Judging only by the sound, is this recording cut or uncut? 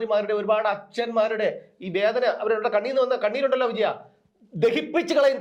uncut